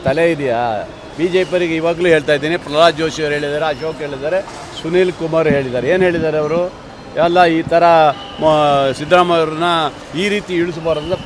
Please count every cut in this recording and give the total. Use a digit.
0